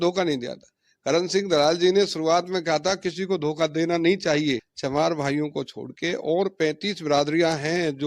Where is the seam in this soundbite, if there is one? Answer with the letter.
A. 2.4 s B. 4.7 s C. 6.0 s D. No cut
B